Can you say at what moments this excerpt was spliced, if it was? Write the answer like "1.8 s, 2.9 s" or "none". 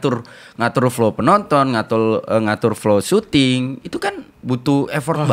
none